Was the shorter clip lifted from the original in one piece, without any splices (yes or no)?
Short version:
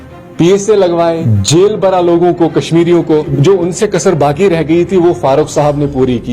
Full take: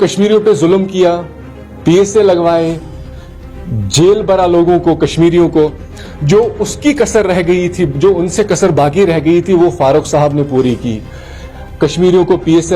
no